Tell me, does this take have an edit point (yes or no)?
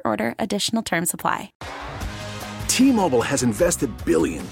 yes